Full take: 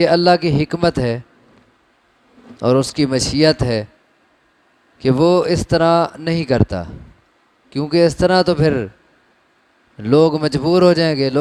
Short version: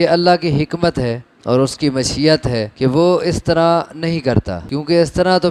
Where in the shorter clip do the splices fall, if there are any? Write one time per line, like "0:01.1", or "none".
0:01.3
0:02.7
0:04.6